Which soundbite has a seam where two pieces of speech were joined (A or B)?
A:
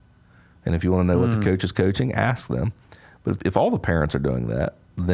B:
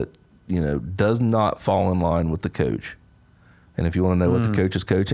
A